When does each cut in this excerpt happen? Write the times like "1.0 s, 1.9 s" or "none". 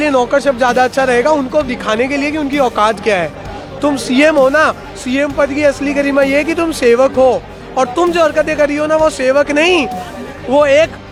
none